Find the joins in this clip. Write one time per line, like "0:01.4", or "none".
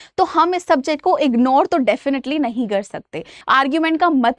0:03.3

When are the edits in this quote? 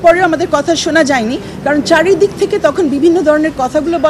none

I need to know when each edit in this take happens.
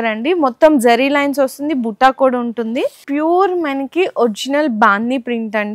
0:03.1

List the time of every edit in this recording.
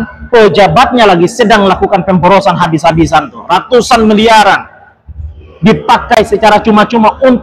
none

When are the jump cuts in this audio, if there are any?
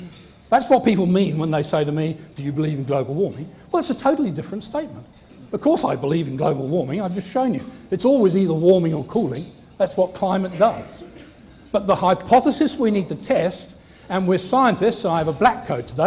0:03.1

